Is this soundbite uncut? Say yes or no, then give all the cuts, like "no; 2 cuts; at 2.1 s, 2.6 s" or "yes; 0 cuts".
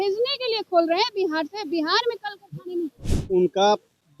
no; 1 cut; at 3.1 s